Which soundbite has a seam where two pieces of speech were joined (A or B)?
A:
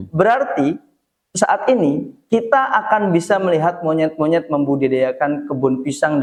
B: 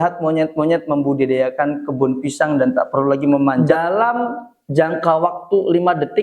B